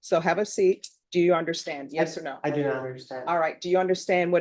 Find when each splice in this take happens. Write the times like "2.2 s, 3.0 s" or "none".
0.9 s

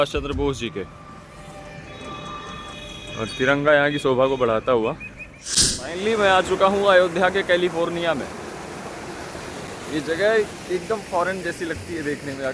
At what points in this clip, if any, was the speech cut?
none

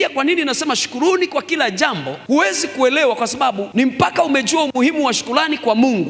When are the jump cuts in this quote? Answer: 2.1 s, 3.6 s

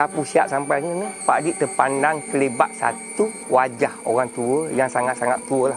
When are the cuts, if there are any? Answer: 1.1 s

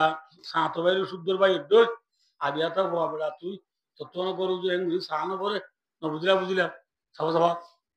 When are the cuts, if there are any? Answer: none

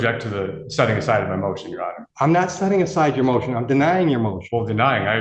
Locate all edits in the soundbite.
2.0 s

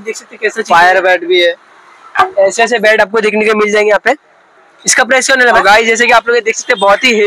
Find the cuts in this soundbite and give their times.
5.4 s

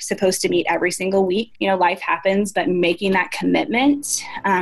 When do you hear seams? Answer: 1.5 s

